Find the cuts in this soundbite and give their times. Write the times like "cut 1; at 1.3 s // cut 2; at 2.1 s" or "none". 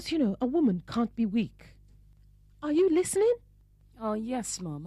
cut 1; at 3.5 s